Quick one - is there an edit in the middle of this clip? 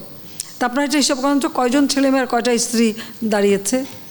no; 0 cuts

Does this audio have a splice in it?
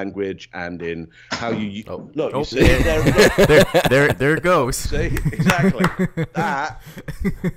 no; 0 cuts

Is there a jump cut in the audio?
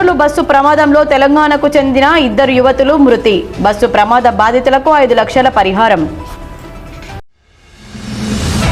no; 0 cuts

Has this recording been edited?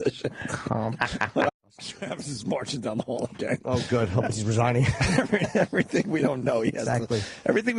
no; 0 cuts

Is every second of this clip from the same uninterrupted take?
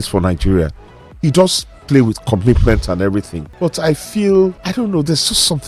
no; 1 cut; at 4.6 s

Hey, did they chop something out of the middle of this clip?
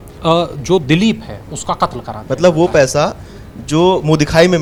no; 0 cuts

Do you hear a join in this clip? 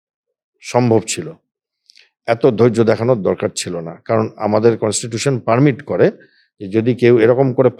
no; 0 cuts

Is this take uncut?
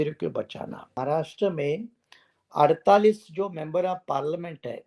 no; 1 cut; at 1.0 s

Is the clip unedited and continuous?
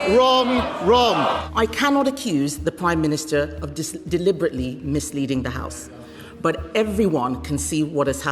no; 1 cut; at 1.4 s

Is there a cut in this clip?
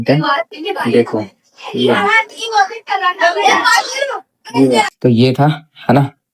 yes; 1 cut; at 4.9 s

